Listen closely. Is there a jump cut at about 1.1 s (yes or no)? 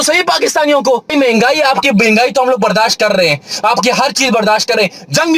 yes